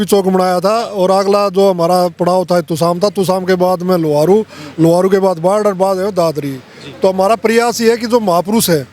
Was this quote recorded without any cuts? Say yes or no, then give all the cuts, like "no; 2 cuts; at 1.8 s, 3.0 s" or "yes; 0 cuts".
yes; 0 cuts